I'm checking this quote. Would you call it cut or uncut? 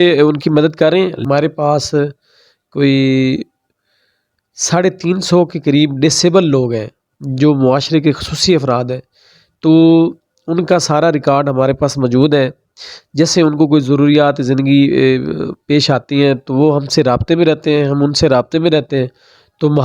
cut